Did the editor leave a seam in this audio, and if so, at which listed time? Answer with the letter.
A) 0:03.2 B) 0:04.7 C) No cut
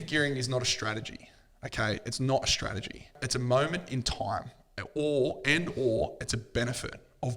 A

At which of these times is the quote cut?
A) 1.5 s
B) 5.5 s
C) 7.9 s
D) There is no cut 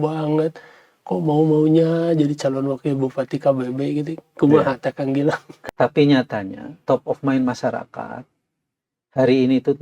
B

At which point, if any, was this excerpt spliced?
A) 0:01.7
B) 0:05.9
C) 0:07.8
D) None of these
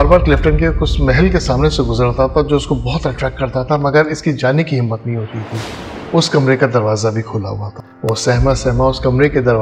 B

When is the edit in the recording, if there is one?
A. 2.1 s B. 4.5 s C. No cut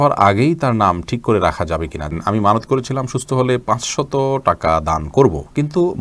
A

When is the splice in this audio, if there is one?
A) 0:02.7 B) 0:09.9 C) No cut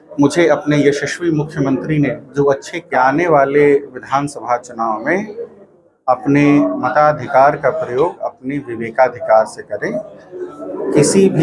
A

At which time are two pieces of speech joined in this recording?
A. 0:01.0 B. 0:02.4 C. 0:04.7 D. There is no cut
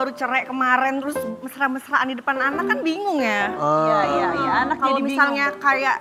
D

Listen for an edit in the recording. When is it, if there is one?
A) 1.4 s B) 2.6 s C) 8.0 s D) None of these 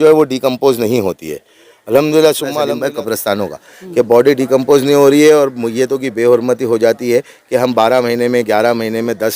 B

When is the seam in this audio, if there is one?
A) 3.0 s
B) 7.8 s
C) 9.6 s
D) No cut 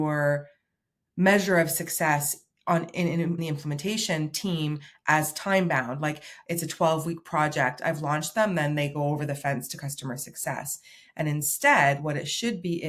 D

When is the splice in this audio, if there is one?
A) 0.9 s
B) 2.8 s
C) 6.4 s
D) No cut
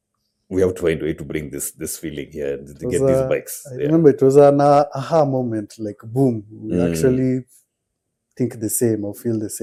D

